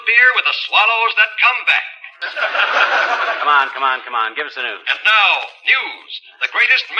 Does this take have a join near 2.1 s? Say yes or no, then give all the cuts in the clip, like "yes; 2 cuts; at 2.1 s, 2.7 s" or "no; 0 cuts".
yes; 1 cut; at 2.1 s